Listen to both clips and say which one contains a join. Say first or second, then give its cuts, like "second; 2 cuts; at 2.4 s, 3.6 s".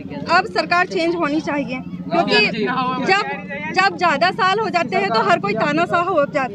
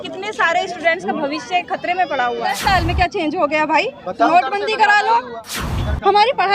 second; 2 cuts; at 2.6 s, 5.4 s